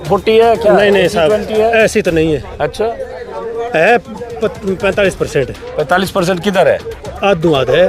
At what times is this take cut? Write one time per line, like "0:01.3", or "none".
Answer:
none

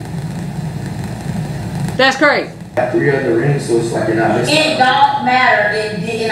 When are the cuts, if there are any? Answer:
0:02.8

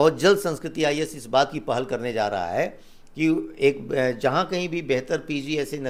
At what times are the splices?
none

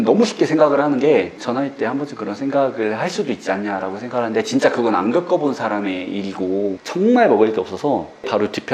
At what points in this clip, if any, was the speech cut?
0:06.8

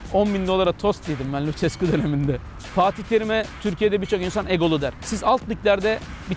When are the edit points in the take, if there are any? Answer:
0:02.5
0:05.0

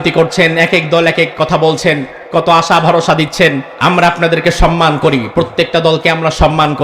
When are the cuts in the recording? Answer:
0:03.7

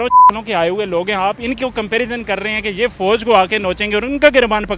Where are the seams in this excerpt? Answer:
none

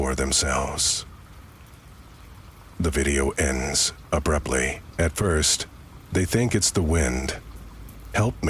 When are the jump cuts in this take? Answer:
0:04.9

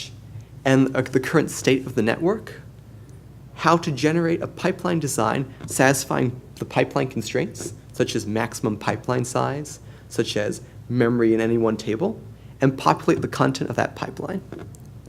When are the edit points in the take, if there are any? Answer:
0:14.1

